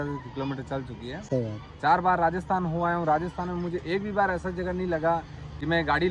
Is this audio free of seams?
yes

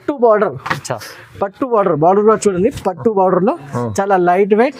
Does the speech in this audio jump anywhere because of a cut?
no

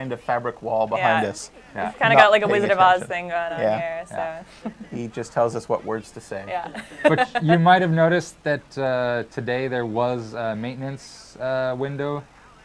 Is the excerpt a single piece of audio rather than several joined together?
no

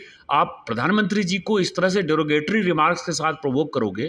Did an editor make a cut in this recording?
no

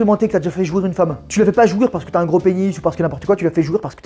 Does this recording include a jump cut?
yes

